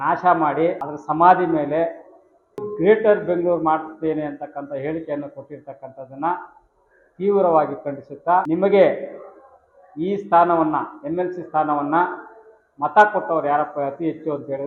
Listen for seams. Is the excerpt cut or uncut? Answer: cut